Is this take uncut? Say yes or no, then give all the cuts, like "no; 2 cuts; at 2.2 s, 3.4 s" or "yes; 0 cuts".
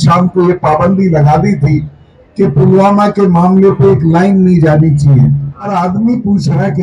no; 1 cut; at 5.5 s